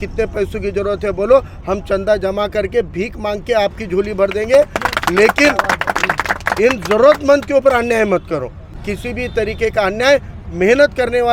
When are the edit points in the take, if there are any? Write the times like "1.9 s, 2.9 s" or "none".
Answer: 8.7 s